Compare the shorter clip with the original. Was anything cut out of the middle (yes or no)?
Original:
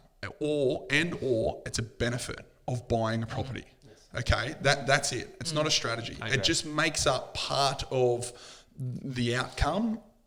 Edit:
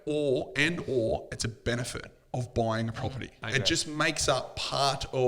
yes